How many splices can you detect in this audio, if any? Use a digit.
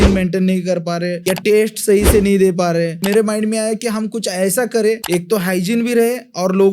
3